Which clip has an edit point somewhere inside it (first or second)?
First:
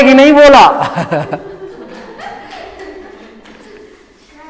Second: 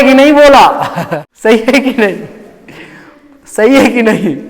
second